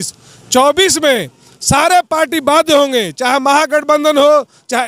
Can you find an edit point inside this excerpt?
no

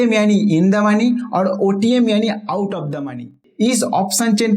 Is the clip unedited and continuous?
no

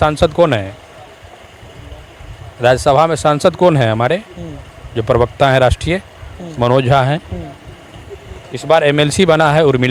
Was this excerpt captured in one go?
yes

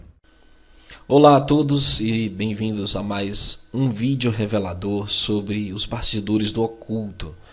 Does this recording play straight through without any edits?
yes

